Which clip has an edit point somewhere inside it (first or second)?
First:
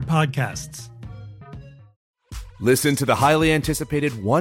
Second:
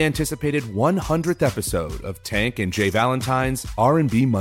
first